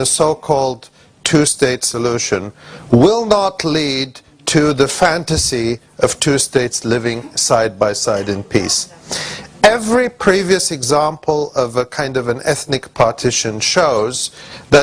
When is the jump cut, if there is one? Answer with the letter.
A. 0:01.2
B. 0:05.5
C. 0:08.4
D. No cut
B